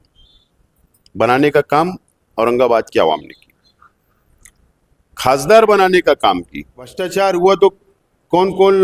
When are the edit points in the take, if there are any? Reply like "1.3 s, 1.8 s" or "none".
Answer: 7.0 s

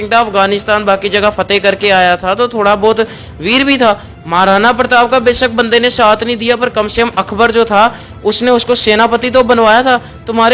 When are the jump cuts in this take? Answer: none

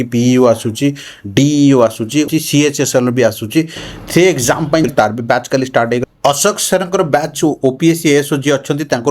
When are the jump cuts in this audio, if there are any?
2.3 s, 4.9 s

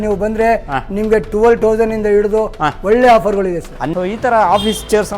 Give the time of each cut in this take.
3.9 s

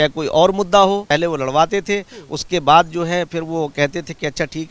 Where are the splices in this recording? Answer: 1.1 s

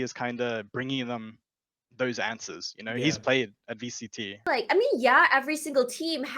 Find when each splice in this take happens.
4.5 s

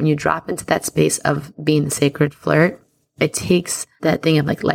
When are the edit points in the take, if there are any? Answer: 3.0 s, 3.8 s

